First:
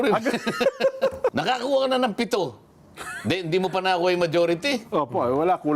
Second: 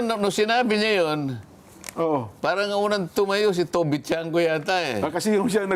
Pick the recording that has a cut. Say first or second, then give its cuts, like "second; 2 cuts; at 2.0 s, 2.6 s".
first; 1 cut; at 1.3 s